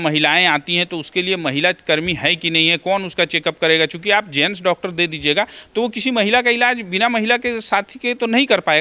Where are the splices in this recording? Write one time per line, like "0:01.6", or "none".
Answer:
none